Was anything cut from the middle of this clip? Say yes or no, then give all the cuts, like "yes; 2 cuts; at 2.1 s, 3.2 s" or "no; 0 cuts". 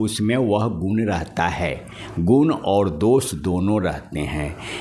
no; 0 cuts